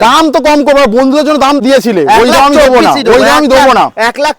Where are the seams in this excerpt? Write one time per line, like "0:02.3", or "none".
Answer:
0:01.6

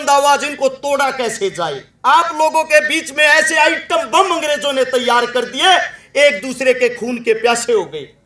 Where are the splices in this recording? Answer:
0:01.9

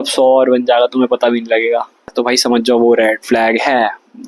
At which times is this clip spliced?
0:02.1

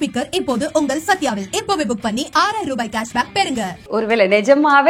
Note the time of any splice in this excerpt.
0:03.8

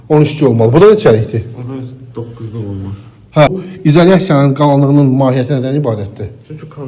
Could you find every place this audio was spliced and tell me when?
none

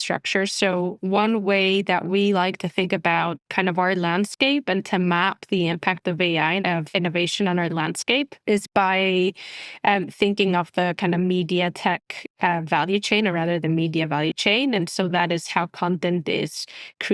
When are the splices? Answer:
0:06.8

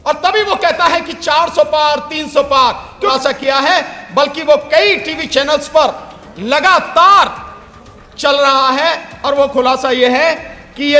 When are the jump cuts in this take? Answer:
0:03.1

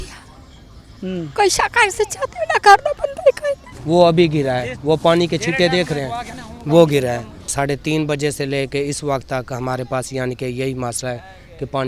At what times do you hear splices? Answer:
0:03.7
0:07.5

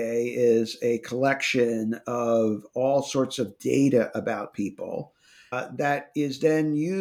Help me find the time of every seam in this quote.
0:05.5

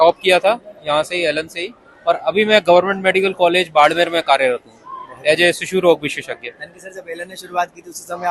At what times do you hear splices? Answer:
none

